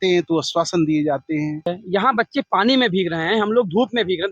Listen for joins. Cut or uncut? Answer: cut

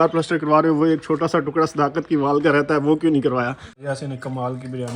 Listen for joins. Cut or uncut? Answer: cut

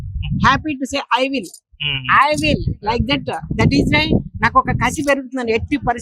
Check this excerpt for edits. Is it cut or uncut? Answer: uncut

